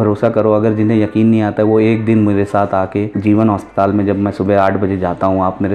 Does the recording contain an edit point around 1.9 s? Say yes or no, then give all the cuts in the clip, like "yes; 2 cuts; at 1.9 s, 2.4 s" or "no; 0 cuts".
no; 1 cut; at 3.1 s